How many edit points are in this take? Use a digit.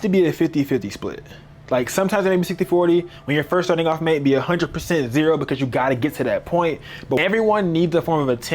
1